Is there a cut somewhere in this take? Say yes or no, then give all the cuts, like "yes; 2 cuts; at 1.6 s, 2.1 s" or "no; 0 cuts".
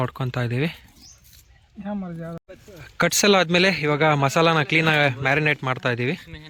no; 0 cuts